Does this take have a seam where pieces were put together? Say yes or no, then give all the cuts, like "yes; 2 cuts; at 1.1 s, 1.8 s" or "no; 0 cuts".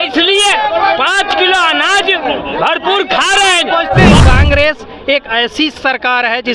yes; 1 cut; at 4.2 s